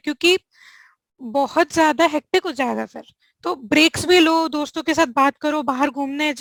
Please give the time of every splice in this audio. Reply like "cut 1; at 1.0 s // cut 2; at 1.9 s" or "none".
none